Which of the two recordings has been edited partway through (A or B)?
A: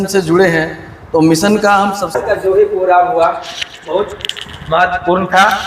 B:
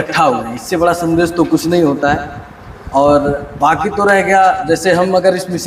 A